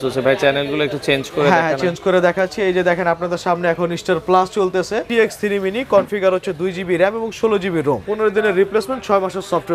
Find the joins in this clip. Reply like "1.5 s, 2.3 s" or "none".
5.1 s, 8.0 s